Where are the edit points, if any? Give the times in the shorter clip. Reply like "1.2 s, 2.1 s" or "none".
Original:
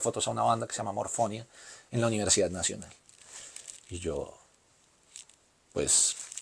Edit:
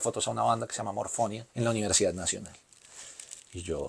1.4 s